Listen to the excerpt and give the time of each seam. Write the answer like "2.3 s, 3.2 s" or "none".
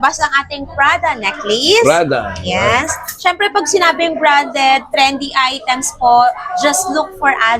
none